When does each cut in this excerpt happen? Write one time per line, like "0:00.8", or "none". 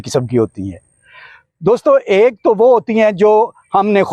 none